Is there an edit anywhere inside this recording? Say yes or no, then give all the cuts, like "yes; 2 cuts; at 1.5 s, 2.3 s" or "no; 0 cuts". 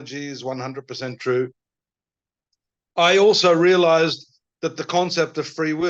no; 0 cuts